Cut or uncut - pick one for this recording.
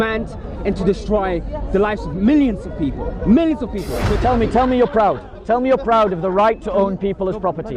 cut